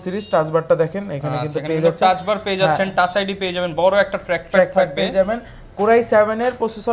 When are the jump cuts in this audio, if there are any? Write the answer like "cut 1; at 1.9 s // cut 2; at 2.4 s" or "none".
none